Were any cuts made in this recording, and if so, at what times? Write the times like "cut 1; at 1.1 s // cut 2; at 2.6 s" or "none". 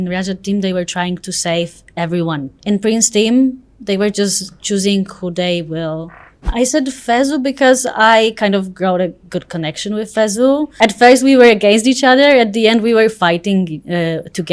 cut 1; at 2.5 s // cut 2; at 6.5 s // cut 3; at 10.7 s